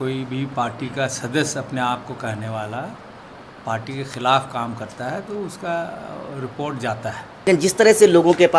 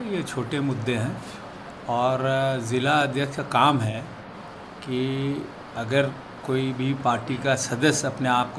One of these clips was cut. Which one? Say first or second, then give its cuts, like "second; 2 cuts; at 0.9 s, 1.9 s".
first; 1 cut; at 7.5 s